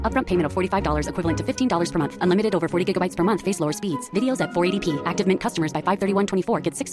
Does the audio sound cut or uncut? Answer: uncut